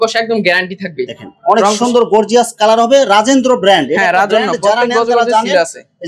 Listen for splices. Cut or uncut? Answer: uncut